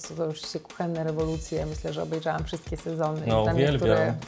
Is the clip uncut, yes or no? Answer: yes